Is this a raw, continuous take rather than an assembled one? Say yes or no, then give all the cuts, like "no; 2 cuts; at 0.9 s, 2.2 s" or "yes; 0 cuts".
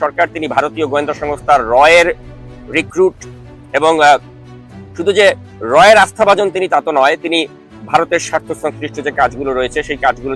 yes; 0 cuts